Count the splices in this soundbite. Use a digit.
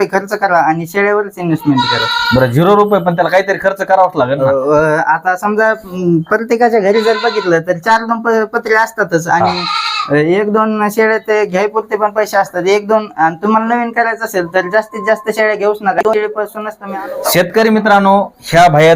0